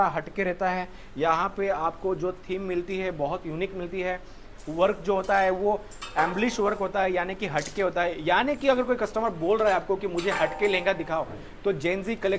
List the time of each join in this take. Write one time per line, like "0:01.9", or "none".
none